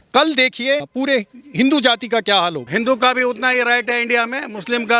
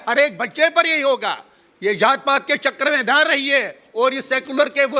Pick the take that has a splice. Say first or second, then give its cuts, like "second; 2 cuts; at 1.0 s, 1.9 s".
first; 1 cut; at 2.6 s